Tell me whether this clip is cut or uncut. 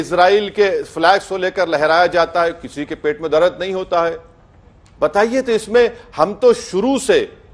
uncut